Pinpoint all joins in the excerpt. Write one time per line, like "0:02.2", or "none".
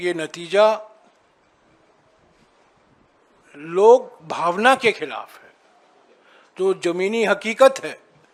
none